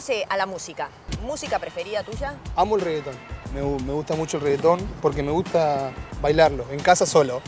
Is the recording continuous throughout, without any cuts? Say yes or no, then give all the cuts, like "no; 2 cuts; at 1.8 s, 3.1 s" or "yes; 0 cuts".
no; 1 cut; at 1.0 s